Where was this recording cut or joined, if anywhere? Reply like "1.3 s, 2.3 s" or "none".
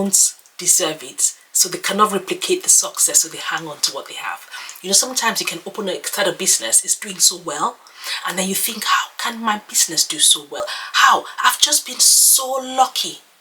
none